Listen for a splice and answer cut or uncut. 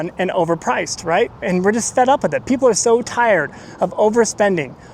uncut